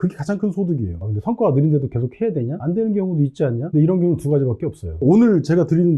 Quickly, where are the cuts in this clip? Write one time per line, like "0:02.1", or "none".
0:01.0
0:03.7
0:05.0